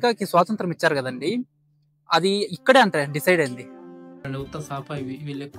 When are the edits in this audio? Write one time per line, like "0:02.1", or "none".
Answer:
0:04.3